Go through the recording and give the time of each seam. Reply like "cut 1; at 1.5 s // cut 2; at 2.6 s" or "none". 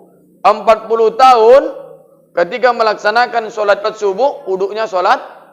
cut 1; at 3.9 s